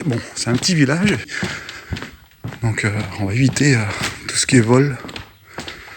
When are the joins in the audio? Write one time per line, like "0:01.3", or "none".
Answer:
0:01.3

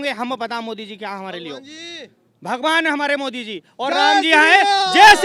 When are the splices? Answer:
none

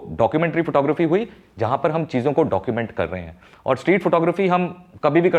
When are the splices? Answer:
none

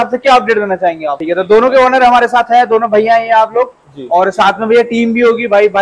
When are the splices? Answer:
0:01.2

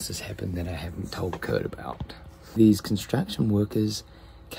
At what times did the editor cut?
0:02.6

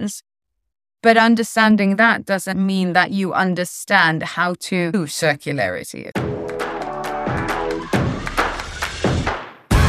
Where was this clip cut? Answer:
0:04.9
0:06.1

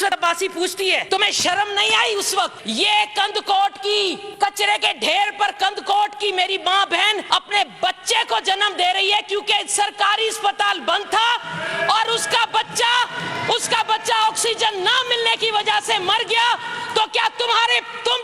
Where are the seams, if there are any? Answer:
0:01.0
0:02.6
0:04.2
0:07.2

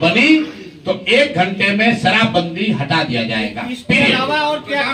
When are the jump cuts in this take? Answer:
none

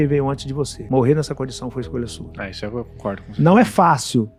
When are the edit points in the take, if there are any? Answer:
none

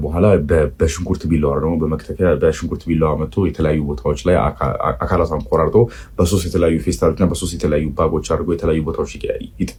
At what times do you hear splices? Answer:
none

